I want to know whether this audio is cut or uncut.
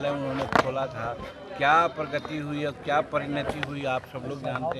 uncut